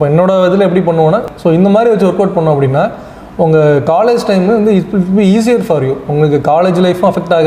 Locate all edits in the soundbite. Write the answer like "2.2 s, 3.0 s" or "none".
1.2 s